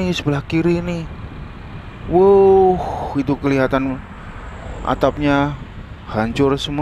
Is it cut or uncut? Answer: uncut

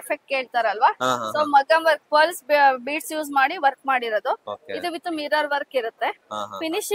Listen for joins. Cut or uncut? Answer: cut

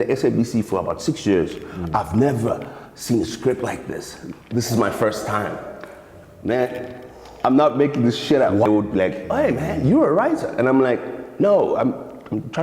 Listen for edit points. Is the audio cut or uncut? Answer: cut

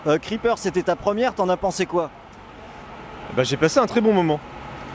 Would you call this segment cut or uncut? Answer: uncut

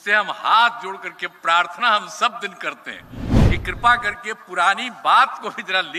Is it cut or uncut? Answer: uncut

